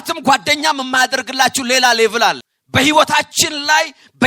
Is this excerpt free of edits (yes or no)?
no